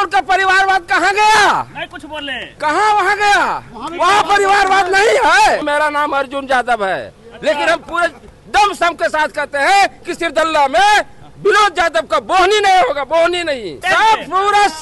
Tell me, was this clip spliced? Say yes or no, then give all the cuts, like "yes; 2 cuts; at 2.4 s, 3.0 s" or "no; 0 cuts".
yes; 2 cuts; at 5.6 s, 13.8 s